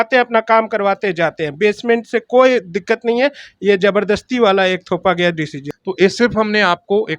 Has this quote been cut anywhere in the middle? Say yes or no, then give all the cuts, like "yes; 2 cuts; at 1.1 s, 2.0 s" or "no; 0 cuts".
yes; 1 cut; at 5.6 s